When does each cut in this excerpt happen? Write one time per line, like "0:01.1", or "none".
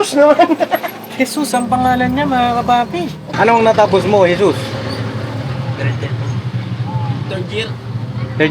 0:03.2